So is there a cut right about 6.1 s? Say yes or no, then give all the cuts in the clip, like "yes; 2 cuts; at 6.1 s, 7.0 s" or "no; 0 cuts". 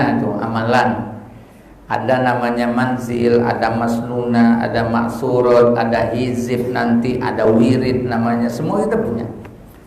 no; 0 cuts